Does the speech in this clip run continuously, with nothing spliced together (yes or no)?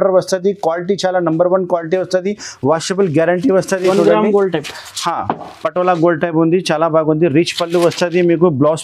yes